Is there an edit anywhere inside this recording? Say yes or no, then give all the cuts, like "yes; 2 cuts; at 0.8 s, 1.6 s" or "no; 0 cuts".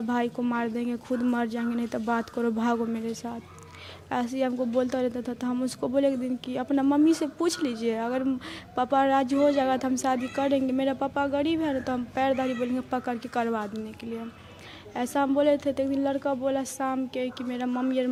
no; 0 cuts